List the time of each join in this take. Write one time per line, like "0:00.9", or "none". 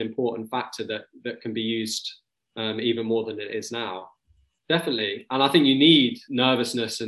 0:04.3
0:06.2